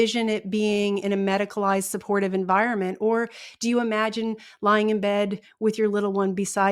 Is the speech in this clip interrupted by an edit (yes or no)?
no